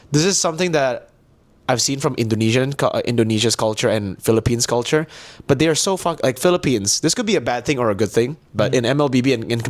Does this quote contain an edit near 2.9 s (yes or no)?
no